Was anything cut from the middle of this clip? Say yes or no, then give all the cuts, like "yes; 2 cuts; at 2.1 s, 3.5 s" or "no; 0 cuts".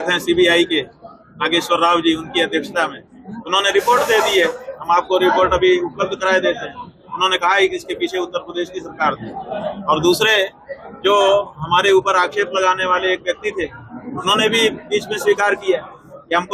no; 0 cuts